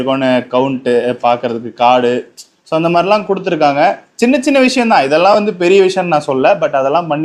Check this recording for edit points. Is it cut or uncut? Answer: uncut